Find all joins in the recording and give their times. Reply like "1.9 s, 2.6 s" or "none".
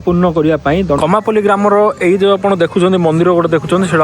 1.0 s

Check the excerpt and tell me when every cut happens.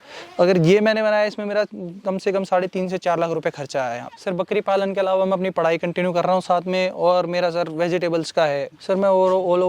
4.1 s, 8.8 s

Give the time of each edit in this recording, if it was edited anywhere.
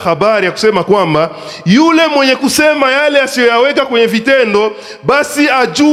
none

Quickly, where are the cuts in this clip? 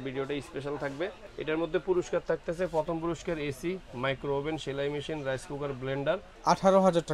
1.3 s, 6.3 s

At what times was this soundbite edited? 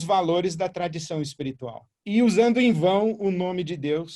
2.0 s

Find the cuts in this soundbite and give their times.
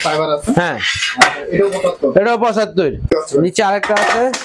3.1 s

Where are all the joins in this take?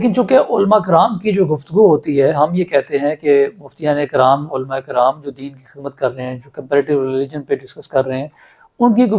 none

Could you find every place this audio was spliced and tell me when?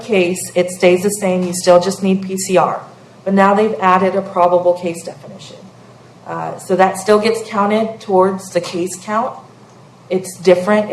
none

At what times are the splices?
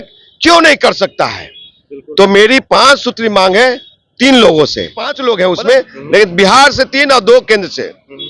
5.1 s

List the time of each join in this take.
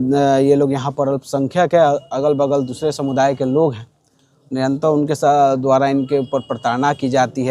none

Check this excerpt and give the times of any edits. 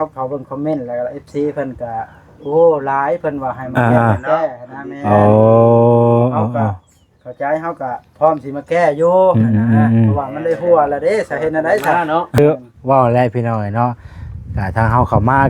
12.4 s

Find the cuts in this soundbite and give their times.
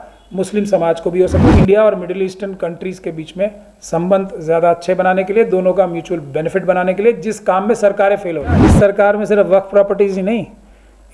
1.4 s, 8.7 s

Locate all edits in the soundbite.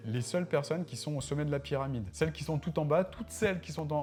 none

